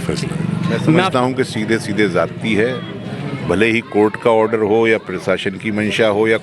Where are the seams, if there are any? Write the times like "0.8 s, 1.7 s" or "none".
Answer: 1.1 s